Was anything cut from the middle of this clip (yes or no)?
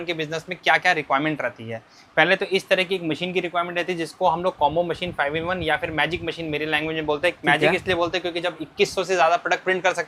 no